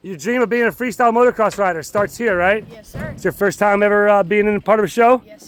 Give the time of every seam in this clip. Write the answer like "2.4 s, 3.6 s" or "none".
none